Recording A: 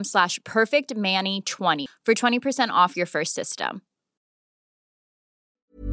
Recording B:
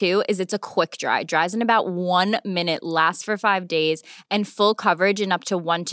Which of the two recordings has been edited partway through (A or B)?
A